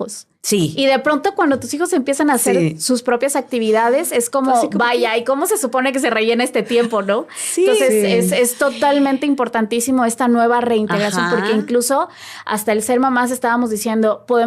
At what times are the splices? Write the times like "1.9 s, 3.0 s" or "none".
none